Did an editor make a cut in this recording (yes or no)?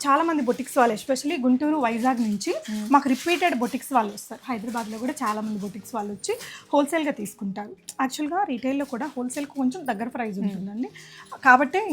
no